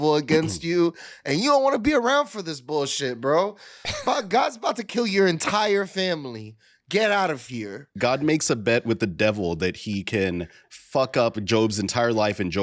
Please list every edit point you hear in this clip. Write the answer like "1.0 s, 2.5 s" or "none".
7.9 s

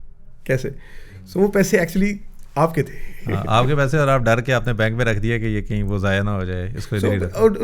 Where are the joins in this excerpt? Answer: none

